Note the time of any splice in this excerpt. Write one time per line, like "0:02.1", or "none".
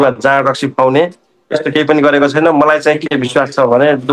none